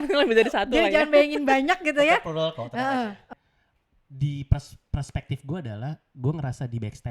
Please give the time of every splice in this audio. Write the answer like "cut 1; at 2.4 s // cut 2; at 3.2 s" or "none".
cut 1; at 3.2 s